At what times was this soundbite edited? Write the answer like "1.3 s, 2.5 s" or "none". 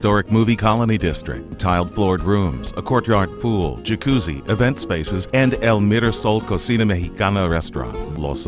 none